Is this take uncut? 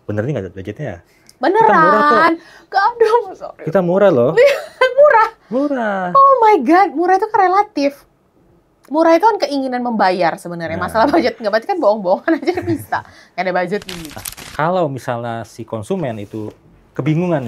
no; 1 cut; at 14.0 s

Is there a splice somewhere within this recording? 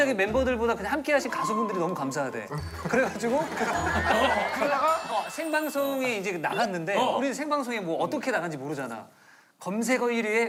no; 0 cuts

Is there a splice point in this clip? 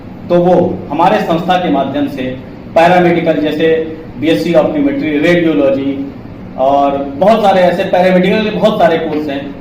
no; 0 cuts

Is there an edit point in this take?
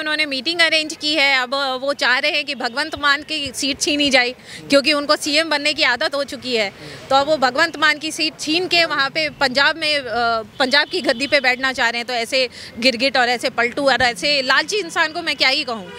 no; 0 cuts

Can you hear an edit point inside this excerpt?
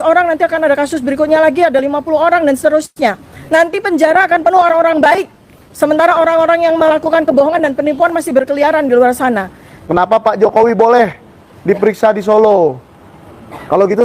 yes; 1 cut; at 9.8 s

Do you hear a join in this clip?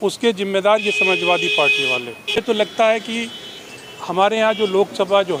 no; 0 cuts

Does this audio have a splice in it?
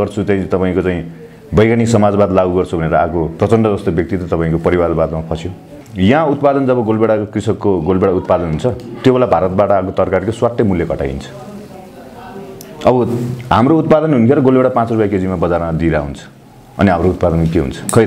yes; 1 cut; at 5.8 s

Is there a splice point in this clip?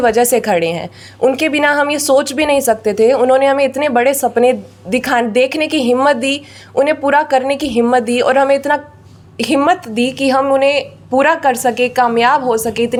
no; 0 cuts

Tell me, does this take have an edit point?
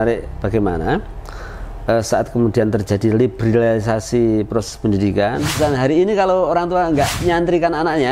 yes; 1 cut; at 5.5 s

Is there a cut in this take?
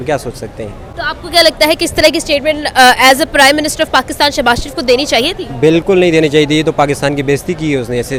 no; 0 cuts

